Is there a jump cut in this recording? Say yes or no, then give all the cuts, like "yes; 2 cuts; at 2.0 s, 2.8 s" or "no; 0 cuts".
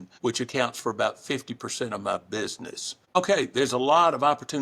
yes; 1 cut; at 3.2 s